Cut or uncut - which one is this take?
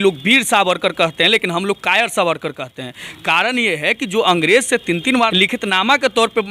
cut